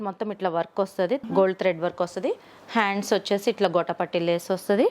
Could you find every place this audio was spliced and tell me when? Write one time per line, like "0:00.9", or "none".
0:01.2